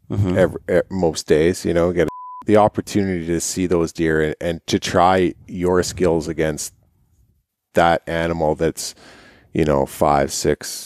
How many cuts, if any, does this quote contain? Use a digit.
1